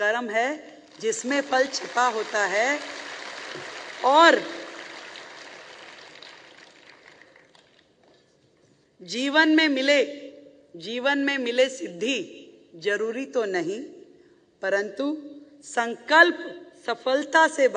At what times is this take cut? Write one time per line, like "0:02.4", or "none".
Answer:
none